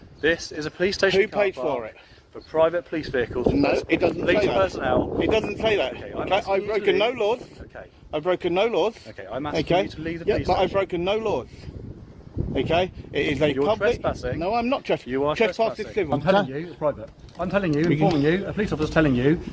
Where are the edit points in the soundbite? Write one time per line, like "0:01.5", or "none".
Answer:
0:16.1